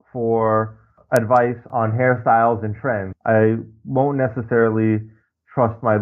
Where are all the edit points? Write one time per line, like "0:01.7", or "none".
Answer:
0:01.0
0:01.6
0:03.1